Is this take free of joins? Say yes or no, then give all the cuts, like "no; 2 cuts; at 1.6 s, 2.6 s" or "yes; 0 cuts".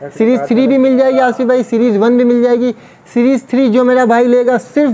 yes; 0 cuts